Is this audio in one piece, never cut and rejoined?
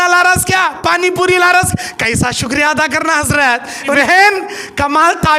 no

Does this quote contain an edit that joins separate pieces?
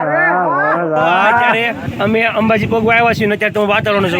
yes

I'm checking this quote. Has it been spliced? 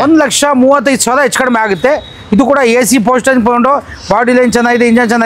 no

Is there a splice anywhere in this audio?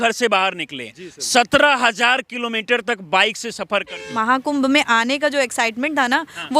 yes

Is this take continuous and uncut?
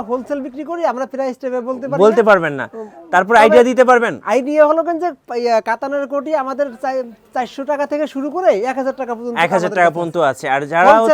yes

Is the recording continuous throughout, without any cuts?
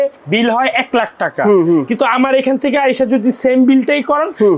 yes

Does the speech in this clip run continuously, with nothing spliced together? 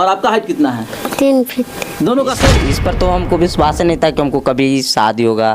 no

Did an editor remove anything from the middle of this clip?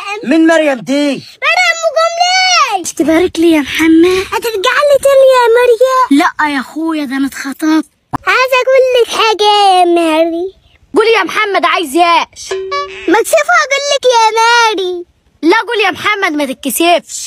yes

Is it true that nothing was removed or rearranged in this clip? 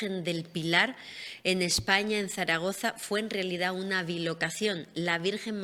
yes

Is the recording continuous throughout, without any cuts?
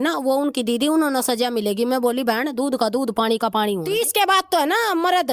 no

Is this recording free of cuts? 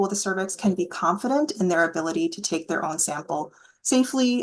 yes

